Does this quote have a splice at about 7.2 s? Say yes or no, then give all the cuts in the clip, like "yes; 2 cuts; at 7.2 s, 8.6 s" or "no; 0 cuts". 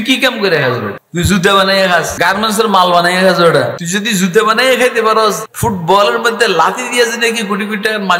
no; 4 cuts; at 1.0 s, 2.1 s, 3.8 s, 5.5 s